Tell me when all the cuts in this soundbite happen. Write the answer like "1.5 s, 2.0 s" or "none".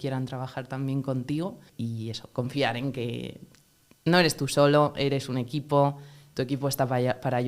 none